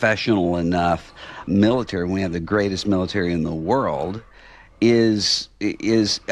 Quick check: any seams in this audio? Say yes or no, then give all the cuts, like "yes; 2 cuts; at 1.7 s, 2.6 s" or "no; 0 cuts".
yes; 1 cut; at 1.4 s